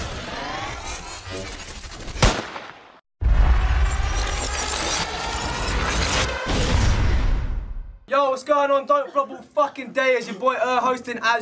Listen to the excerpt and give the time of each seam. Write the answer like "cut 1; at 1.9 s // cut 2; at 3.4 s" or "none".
cut 1; at 3.0 s